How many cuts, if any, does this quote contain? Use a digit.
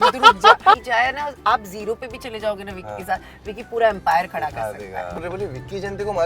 2